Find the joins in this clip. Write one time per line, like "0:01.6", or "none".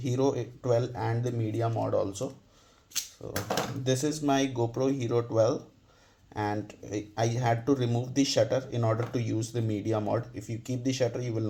none